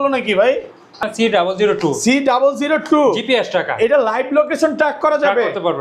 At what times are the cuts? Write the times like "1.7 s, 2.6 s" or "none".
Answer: 1.0 s